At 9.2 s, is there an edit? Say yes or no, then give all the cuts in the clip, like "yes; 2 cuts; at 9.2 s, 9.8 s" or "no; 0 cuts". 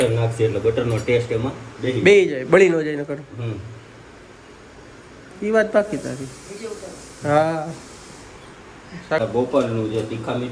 yes; 1 cut; at 9.2 s